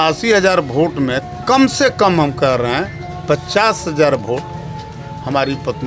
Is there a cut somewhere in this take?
no; 0 cuts

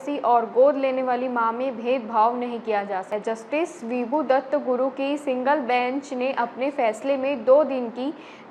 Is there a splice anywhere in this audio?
yes; 1 cut; at 3.1 s

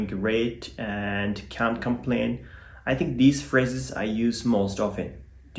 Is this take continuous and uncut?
yes; 0 cuts

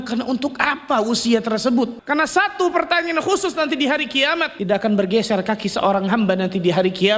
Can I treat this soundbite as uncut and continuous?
no; 2 cuts; at 2.0 s, 4.5 s

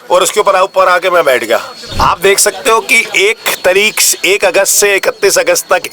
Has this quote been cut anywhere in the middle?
yes; 1 cut; at 1.8 s

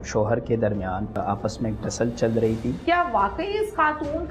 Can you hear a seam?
yes; 2 cuts; at 1.1 s, 2.8 s

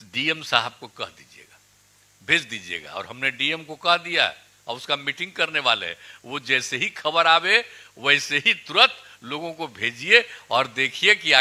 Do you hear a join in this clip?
no; 0 cuts

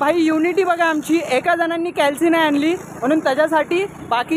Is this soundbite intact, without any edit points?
yes; 0 cuts

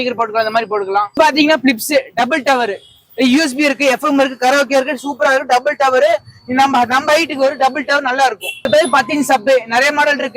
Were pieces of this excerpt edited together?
yes; 2 cuts; at 1.2 s, 8.7 s

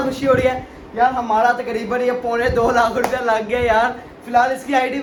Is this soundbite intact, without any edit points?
yes; 0 cuts

